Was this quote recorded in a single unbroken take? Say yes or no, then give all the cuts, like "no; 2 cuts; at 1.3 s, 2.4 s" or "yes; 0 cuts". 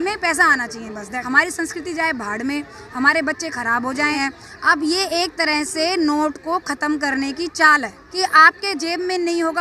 no; 3 cuts; at 1.1 s, 4.2 s, 8.0 s